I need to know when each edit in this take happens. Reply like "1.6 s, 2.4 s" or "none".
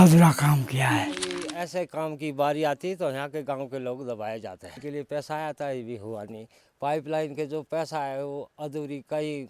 1.5 s, 4.8 s